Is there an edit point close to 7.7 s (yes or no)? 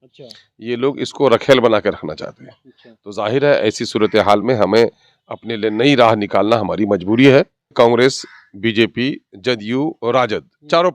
yes